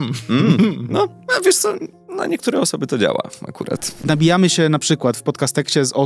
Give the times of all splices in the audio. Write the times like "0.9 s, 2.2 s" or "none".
3.9 s